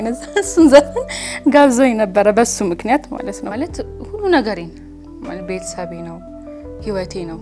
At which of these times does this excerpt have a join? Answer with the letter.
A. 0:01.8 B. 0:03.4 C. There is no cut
B